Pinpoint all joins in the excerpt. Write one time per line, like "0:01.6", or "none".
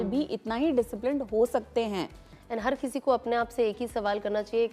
none